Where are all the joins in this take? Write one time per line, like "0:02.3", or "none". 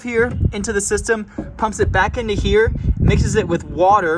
none